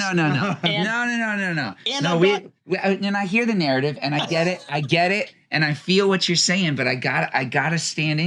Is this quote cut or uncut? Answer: uncut